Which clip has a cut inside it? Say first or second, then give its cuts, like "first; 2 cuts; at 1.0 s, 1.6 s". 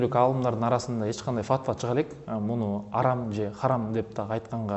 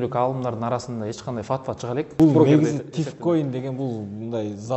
second; 1 cut; at 2.1 s